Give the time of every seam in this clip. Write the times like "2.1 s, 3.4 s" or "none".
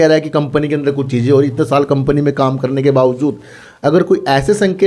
none